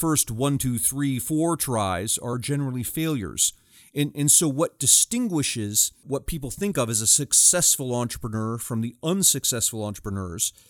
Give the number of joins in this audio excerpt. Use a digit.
2